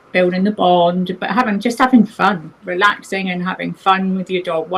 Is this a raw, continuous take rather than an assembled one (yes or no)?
yes